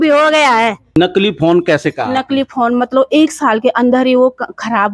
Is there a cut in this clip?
yes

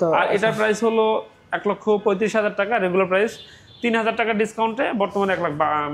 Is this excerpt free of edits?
yes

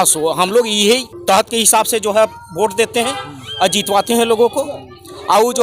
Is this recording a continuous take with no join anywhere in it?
no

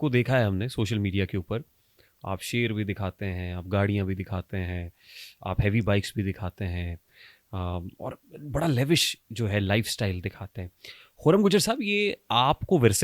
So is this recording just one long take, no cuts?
yes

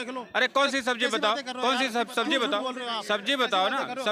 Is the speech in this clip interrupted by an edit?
no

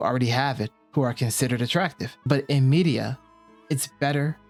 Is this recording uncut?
yes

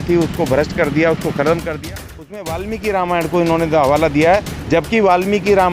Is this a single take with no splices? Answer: no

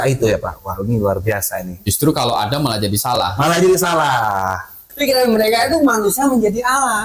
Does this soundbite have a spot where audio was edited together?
yes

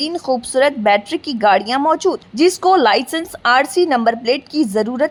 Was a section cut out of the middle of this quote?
no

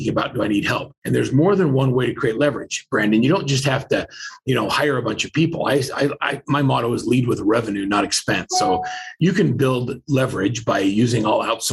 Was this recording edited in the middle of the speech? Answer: yes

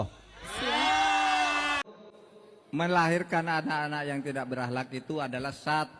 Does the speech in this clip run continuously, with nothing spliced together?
no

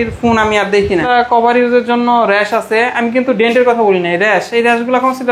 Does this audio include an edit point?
yes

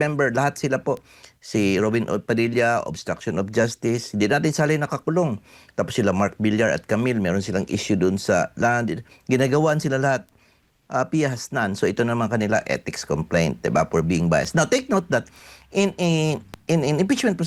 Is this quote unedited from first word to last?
yes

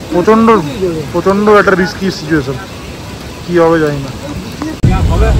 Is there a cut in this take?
no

